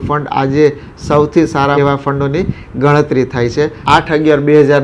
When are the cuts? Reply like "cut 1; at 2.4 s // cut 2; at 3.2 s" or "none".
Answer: cut 1; at 3.8 s